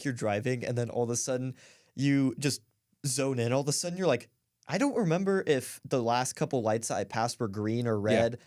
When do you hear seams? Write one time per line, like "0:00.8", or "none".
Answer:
none